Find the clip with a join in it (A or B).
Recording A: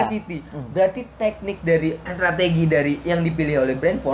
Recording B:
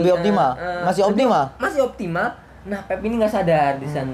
A